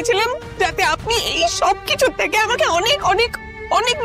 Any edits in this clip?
no; 0 cuts

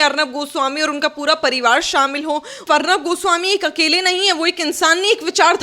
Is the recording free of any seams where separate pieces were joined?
no; 1 cut; at 2.6 s

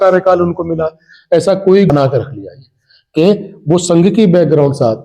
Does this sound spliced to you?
yes; 1 cut; at 1.9 s

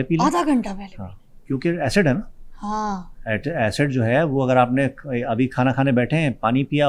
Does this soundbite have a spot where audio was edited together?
no; 0 cuts

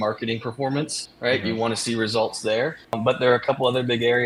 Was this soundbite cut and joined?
no; 0 cuts

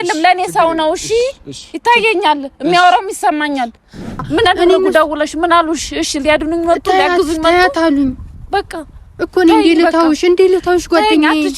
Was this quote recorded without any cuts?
no; 1 cut; at 4.1 s

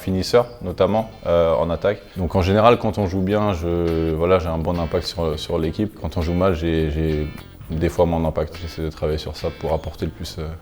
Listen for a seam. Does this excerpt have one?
yes; 3 cuts; at 2.1 s, 6.1 s, 8.7 s

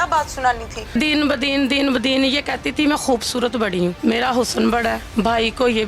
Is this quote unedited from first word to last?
no; 3 cuts; at 0.9 s, 4.0 s, 5.0 s

